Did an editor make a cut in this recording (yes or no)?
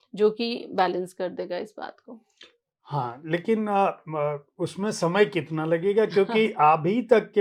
no